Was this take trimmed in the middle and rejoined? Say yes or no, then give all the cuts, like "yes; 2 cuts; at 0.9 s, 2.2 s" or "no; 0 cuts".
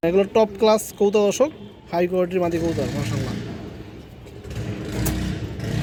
no; 0 cuts